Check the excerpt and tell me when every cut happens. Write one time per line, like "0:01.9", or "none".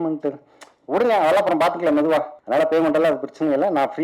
0:02.4

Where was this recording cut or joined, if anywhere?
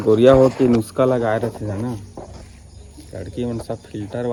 none

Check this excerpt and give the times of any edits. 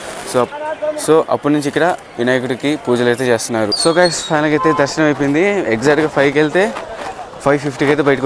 0:03.8

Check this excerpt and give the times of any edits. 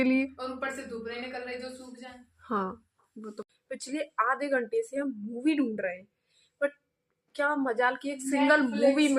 0:03.4

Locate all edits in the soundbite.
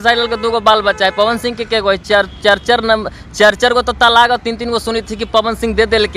none

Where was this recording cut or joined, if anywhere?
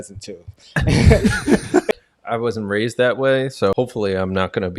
0:01.9
0:03.7

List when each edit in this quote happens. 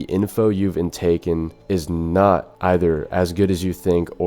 0:01.5
0:02.5

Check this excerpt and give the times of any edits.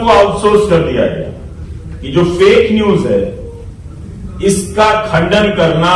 none

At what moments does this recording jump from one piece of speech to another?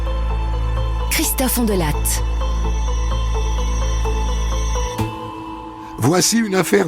0:04.9

